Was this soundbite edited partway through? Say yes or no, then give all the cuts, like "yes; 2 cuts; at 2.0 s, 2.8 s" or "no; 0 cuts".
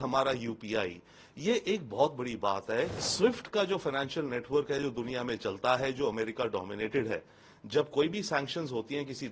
yes; 1 cut; at 3.0 s